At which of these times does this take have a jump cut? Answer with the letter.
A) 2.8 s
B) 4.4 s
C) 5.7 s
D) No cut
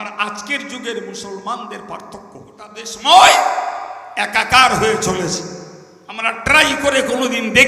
A